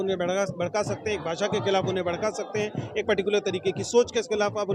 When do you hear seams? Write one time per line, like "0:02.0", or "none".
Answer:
none